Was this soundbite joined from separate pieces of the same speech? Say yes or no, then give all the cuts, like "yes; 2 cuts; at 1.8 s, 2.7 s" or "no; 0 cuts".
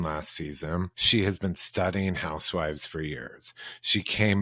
yes; 1 cut; at 1.0 s